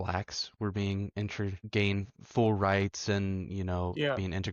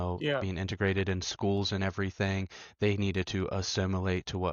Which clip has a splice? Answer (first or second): first